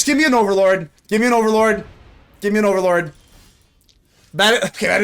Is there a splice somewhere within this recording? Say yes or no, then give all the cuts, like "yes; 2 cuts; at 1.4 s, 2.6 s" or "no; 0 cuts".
yes; 1 cut; at 0.9 s